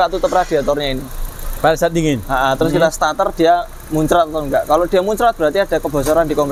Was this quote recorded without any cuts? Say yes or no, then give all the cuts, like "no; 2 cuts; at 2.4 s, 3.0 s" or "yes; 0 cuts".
yes; 0 cuts